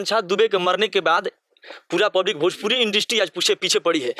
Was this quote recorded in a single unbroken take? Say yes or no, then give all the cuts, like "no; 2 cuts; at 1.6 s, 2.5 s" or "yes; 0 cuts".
yes; 0 cuts